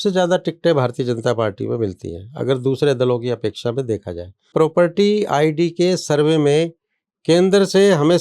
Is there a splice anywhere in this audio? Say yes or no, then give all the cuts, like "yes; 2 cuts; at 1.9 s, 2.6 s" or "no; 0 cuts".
yes; 1 cut; at 4.5 s